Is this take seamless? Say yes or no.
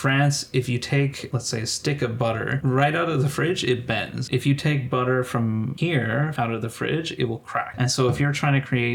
no